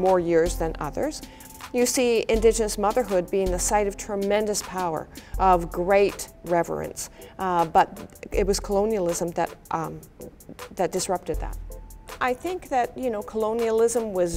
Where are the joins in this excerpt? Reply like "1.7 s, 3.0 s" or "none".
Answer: 12.1 s